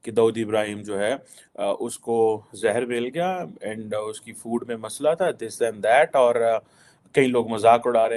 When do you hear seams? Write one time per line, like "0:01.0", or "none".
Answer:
none